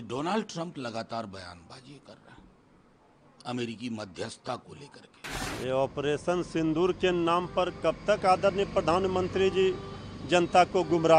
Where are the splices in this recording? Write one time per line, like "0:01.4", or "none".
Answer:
0:05.3